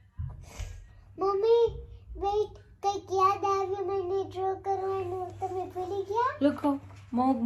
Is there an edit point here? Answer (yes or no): no